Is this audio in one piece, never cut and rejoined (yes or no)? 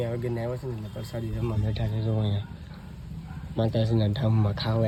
yes